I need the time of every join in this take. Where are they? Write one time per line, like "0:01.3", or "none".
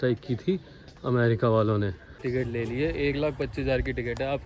0:02.2